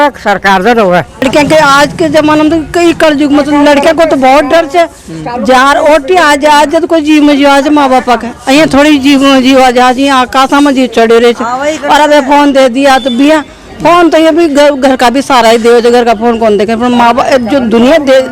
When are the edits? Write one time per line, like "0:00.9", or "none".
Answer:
none